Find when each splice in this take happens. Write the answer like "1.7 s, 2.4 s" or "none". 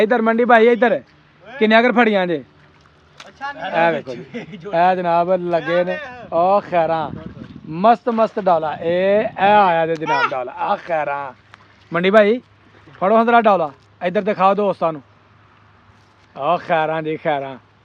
none